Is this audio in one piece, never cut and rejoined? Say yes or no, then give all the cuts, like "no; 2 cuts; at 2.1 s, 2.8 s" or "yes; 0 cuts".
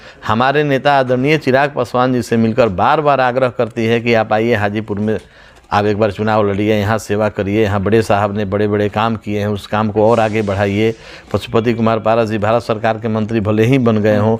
yes; 0 cuts